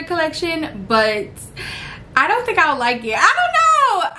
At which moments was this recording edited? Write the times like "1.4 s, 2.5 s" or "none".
none